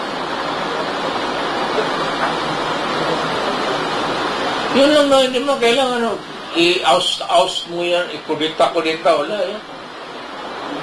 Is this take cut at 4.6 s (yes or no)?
yes